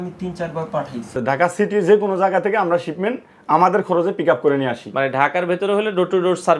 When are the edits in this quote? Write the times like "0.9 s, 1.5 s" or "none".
1.2 s